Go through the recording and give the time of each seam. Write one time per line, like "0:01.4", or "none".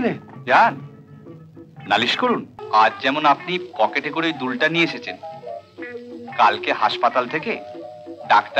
0:02.5